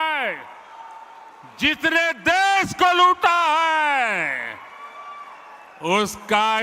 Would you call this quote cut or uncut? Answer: uncut